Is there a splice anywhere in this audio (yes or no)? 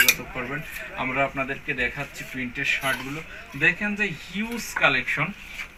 no